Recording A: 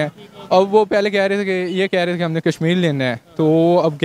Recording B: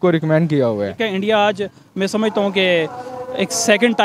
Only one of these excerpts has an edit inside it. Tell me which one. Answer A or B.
B